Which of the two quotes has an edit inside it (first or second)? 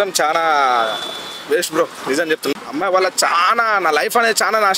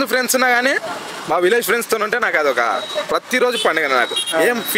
first